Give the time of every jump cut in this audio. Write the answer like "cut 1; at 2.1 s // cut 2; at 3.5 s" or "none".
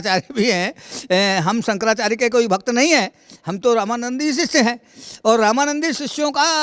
none